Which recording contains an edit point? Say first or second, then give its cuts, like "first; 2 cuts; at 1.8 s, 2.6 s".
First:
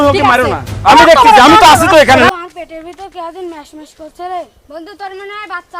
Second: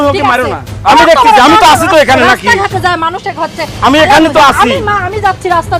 first; 1 cut; at 2.3 s